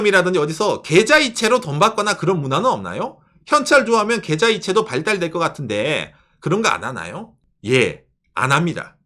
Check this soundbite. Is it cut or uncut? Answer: uncut